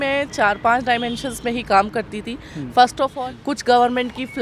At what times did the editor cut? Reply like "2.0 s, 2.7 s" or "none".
3.1 s